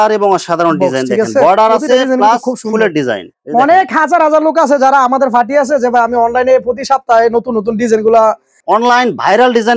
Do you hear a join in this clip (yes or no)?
yes